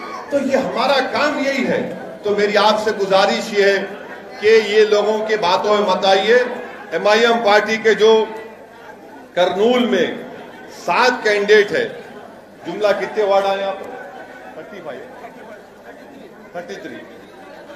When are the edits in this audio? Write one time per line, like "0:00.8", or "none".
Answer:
0:16.0